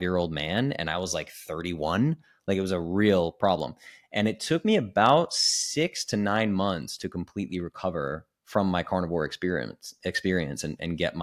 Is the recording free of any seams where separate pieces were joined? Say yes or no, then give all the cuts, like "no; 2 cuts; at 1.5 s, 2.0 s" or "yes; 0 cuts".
yes; 0 cuts